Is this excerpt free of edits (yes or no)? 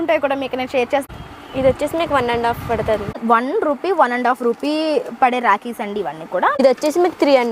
no